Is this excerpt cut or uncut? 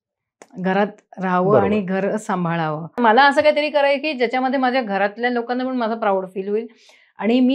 cut